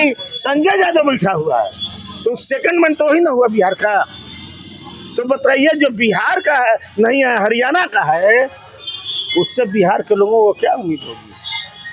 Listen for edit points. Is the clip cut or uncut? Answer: uncut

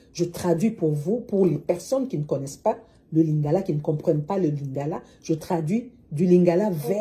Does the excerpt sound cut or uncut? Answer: uncut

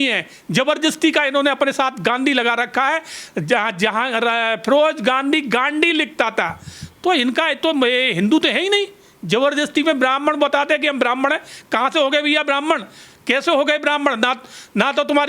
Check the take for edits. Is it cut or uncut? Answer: uncut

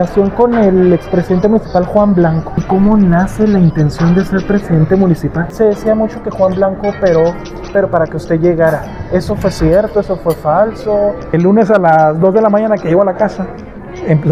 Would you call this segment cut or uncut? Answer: cut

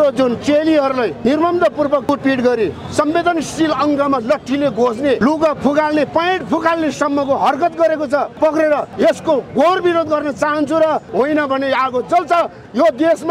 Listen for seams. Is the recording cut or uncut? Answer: cut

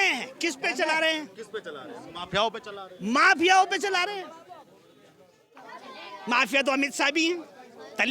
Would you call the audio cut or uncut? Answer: uncut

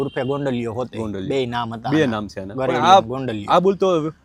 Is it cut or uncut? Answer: uncut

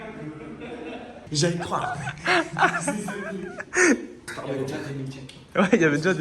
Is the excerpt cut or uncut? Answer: cut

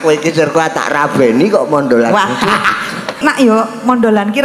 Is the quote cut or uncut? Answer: cut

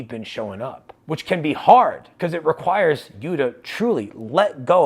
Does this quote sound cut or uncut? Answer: cut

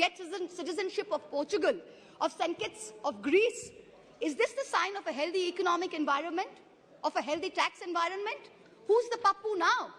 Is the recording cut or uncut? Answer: uncut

